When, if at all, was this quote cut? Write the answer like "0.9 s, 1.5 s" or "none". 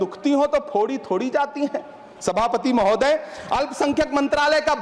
none